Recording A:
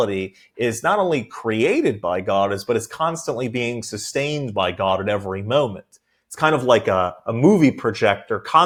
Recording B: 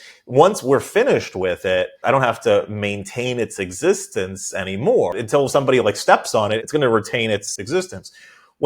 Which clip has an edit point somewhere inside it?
B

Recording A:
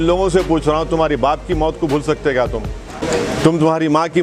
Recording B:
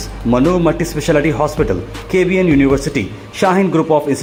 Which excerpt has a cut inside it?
A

